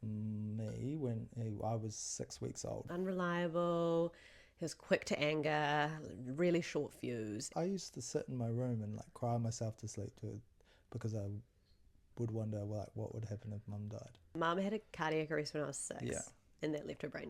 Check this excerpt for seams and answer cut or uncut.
cut